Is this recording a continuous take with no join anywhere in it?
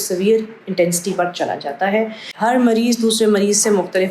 no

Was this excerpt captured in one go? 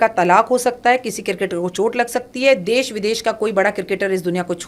yes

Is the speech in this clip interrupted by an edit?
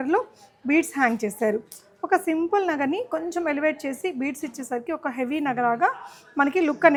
no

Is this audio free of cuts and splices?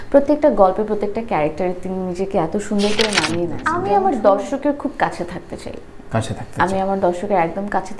no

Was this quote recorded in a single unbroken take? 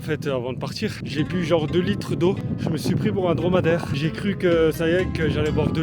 no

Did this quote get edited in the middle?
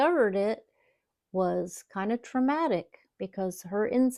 no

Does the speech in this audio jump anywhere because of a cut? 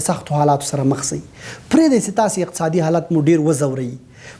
no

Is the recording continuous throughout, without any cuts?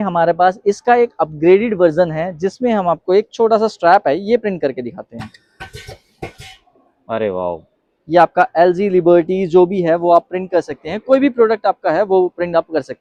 yes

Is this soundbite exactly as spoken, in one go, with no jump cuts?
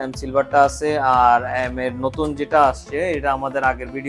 yes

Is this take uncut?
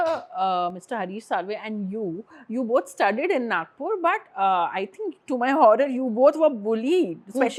yes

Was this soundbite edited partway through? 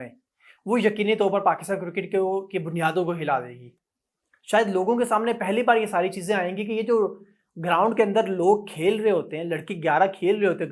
no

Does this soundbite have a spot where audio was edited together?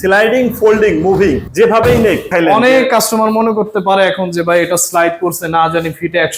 yes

